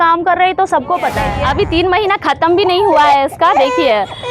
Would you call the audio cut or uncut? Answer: cut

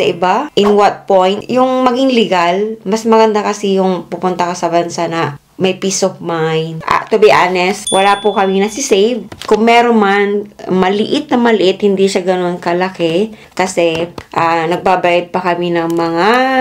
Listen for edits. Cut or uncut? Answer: cut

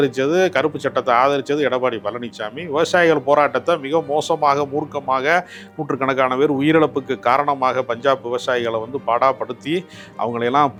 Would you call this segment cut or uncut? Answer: uncut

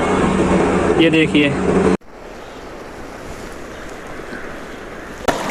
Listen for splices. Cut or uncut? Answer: uncut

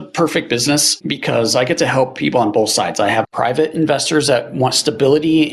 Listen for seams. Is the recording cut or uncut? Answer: cut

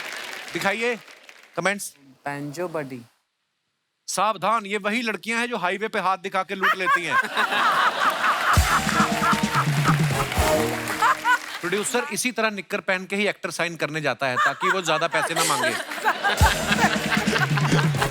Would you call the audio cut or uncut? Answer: cut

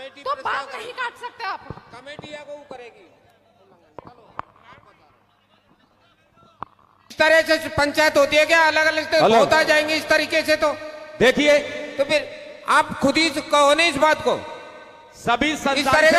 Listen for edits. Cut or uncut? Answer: cut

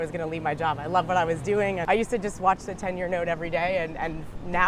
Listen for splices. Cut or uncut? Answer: cut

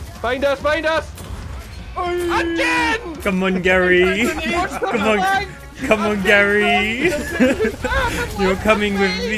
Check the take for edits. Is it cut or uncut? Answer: uncut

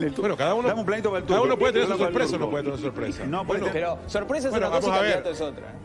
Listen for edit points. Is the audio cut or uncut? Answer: uncut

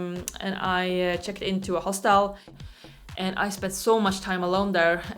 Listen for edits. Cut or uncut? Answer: cut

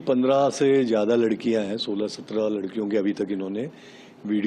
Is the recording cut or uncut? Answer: uncut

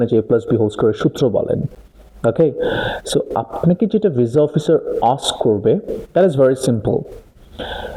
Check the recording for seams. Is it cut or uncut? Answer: uncut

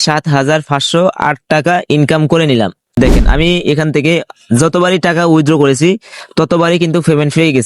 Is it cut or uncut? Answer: cut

